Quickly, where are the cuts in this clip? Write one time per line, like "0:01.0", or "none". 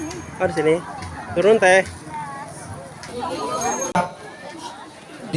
0:04.0

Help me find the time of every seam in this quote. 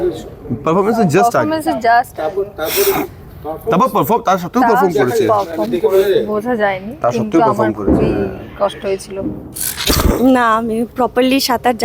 0:09.8

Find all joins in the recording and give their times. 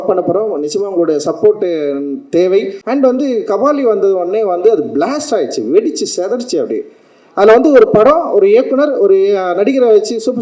0:02.8

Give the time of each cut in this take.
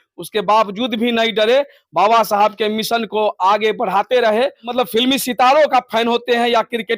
0:04.6

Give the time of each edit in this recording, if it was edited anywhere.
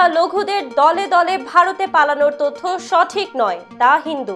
none

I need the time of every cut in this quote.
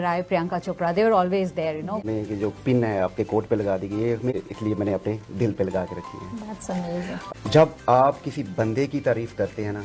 0:02.0
0:04.4
0:07.2

